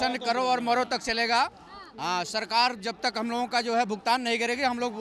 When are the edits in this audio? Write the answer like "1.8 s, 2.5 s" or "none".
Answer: none